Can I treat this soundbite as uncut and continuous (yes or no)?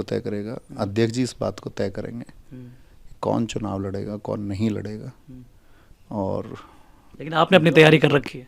yes